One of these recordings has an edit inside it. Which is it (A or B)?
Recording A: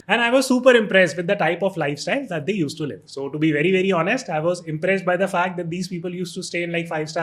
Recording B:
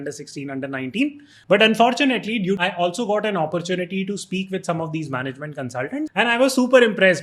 B